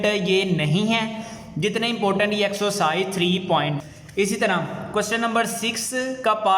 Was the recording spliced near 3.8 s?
yes; 1 cut; at 3.8 s

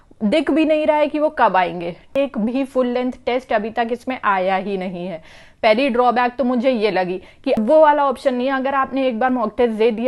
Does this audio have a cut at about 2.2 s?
yes; 2 cuts; at 2.2 s, 7.6 s

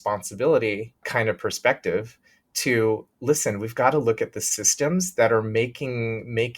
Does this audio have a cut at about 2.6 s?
no; 1 cut; at 1.0 s

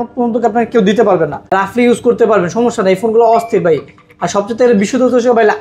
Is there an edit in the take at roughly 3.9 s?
no; 1 cut; at 1.5 s

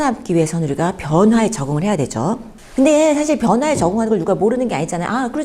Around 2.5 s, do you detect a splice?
yes; 1 cut; at 2.5 s

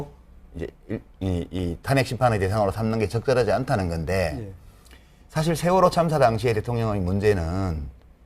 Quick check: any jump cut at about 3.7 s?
yes; 1 cut; at 3.7 s

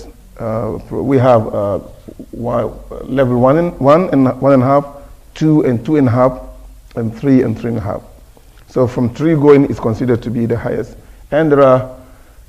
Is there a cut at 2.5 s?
no; 1 cut; at 6.3 s

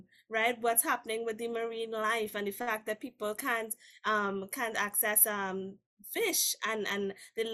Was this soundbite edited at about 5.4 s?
no; 0 cuts

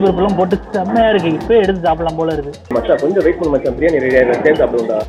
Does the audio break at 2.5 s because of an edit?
no; 0 cuts

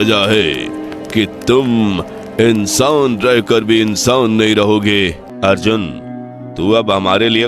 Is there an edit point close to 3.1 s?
no; 1 cut; at 5.2 s

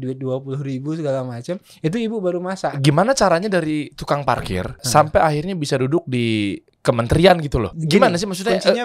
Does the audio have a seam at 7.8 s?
yes; 4 cuts; at 2.8 s, 4.8 s, 6.7 s, 7.8 s

